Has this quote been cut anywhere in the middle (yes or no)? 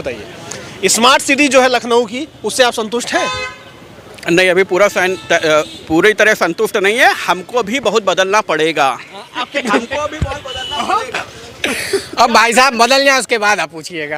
no